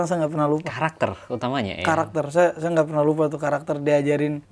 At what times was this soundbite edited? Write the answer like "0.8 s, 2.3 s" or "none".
none